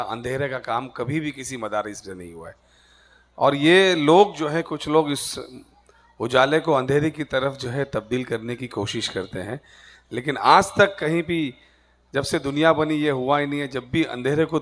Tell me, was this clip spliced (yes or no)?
no